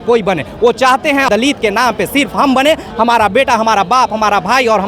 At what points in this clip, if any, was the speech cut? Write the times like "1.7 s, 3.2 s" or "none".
1.3 s